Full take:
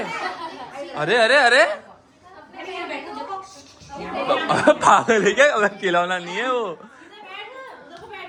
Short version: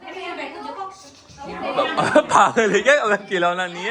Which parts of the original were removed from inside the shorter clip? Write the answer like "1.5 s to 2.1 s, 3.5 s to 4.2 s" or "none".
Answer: none

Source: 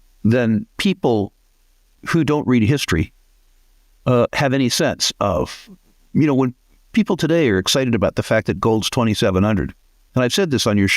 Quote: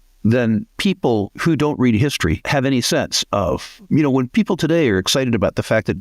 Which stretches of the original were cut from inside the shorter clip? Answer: 1.3 s to 2.0 s, 3.1 s to 4.3 s, 5.9 s to 6.7 s

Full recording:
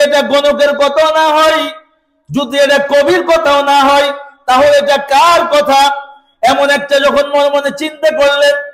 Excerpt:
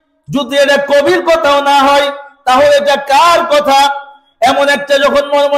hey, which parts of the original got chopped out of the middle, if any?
none

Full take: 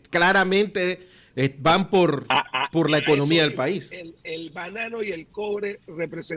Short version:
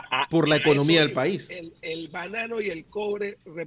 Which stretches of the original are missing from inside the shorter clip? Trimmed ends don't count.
none

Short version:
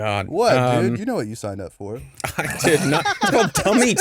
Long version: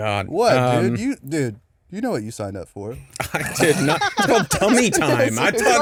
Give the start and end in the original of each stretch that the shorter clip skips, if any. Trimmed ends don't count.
1.0 s to 1.9 s

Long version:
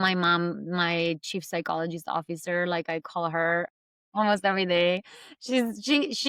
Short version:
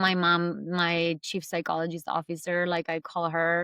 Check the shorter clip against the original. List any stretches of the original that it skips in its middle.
none

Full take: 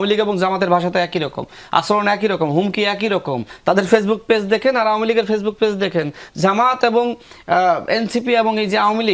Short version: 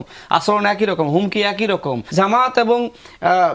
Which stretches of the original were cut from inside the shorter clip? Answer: 3.4 s to 6.3 s

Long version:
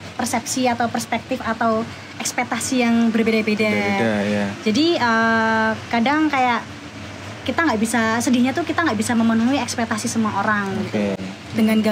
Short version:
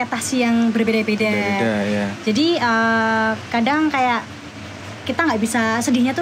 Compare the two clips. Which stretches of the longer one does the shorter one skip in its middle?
none

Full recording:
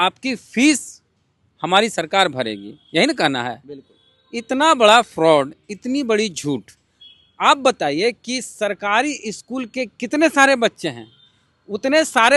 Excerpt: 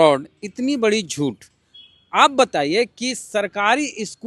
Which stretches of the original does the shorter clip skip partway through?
none

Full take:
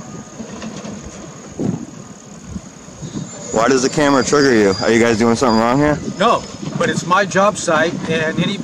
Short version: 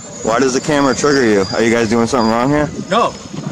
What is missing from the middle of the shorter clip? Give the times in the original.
none

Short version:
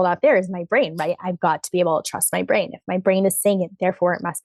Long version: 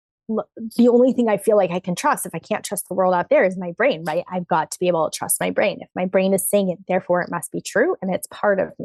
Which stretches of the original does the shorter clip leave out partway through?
none

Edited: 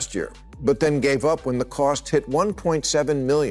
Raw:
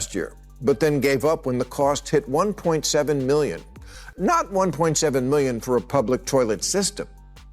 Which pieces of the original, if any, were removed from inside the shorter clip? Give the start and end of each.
none

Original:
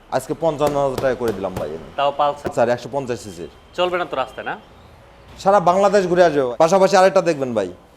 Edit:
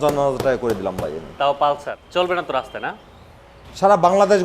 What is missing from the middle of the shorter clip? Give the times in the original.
2.4 s to 3.5 s

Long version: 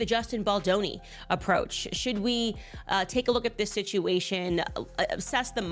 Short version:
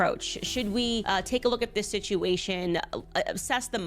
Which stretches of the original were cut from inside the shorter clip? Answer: 2.5 s to 2.9 s

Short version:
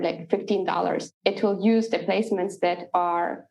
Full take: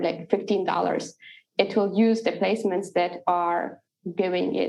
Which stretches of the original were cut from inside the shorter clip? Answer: 1.1 s to 1.4 s

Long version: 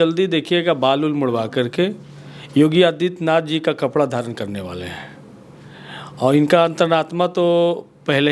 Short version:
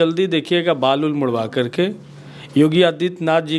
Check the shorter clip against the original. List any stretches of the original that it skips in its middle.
none

